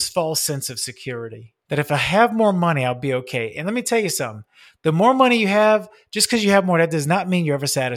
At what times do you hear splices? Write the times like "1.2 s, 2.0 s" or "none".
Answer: 1.5 s